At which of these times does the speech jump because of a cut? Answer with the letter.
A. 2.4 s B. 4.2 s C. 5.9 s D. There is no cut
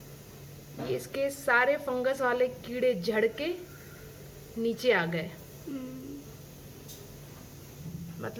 D